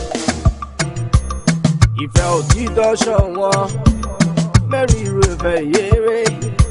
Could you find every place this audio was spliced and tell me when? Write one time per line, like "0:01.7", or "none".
0:01.9